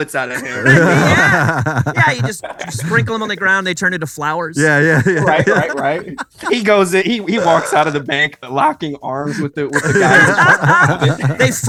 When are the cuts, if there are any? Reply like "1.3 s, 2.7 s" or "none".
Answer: none